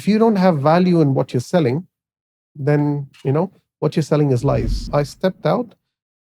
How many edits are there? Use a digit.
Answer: 1